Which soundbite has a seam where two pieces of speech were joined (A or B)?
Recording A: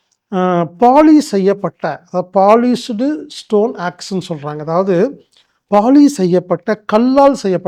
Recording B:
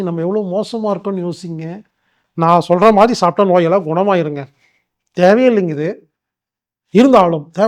B